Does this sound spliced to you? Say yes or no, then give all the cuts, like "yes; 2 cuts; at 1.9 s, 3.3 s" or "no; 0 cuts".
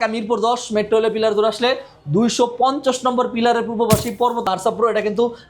yes; 1 cut; at 4.4 s